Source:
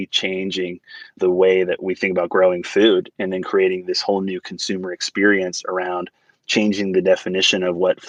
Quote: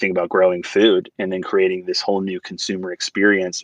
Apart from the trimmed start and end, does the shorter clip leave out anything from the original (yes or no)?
no